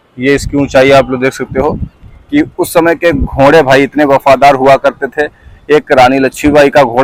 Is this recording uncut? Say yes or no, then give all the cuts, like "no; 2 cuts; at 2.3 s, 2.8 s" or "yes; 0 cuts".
yes; 0 cuts